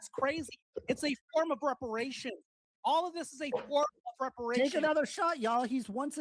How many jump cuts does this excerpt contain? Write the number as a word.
zero